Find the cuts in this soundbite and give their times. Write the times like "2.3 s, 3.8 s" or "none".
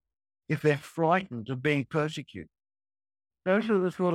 3.2 s